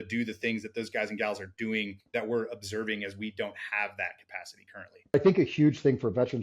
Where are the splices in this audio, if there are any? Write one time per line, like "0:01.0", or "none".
0:02.0
0:05.1